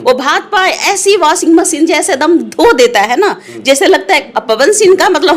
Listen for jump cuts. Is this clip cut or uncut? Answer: uncut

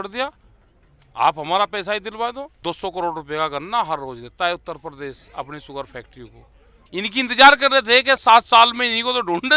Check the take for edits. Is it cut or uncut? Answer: cut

